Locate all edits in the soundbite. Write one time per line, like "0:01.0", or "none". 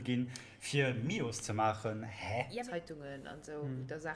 0:02.6